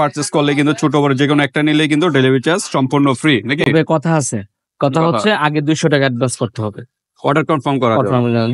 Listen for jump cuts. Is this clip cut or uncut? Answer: uncut